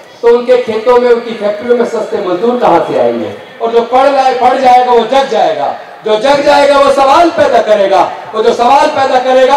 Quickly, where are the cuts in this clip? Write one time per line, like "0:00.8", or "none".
0:03.5